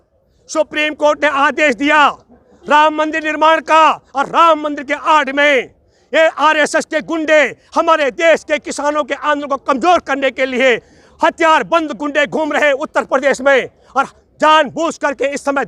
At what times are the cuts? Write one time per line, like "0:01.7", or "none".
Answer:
none